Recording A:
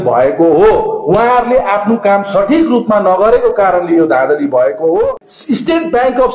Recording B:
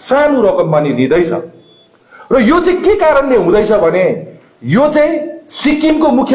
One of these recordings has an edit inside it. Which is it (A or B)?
A